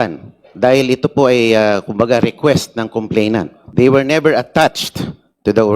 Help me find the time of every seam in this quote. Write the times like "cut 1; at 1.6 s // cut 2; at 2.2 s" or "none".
cut 1; at 3.6 s